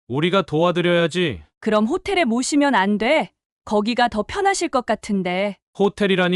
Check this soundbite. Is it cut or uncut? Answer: uncut